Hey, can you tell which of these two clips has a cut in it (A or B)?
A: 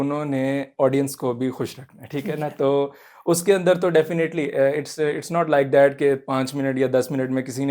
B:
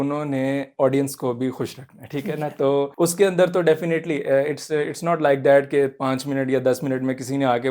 B